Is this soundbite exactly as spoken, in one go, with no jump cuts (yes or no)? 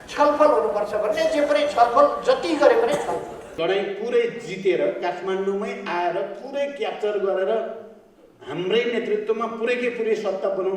no